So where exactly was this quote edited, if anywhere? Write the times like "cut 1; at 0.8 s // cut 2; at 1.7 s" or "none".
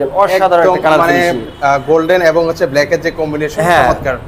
none